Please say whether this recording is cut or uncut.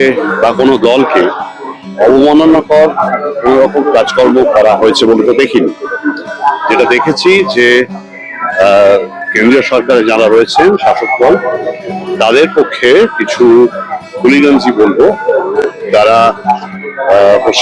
uncut